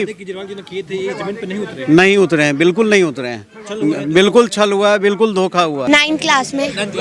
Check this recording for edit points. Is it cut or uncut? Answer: cut